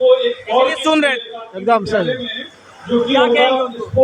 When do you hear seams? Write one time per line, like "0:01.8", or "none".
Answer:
none